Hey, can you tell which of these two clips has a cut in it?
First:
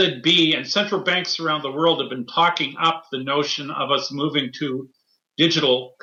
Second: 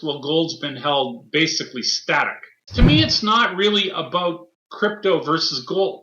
second; 1 cut; at 2.6 s

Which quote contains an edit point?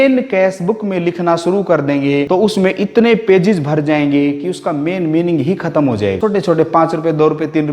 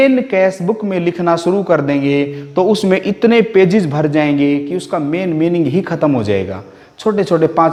first; 2 cuts; at 2.3 s, 6.2 s

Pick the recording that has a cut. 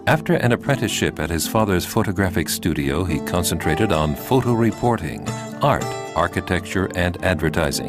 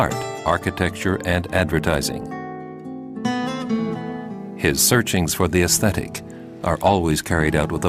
first; 1 cut; at 3.5 s

